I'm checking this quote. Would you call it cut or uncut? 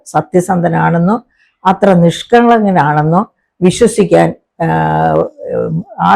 uncut